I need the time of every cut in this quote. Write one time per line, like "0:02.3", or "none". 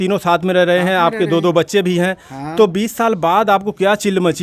none